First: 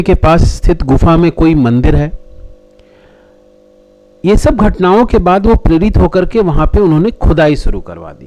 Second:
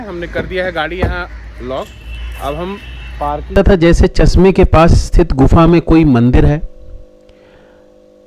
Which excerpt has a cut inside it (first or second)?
second